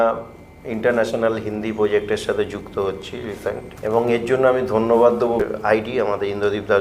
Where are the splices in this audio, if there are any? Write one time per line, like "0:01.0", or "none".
0:03.7
0:05.4